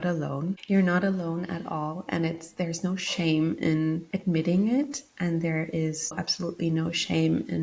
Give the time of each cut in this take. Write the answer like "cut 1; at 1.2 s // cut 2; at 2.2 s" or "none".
cut 1; at 4.1 s